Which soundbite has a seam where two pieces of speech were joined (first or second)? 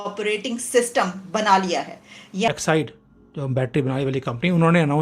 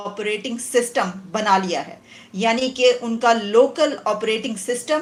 first